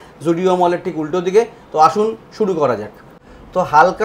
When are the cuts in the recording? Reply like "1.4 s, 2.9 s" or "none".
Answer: none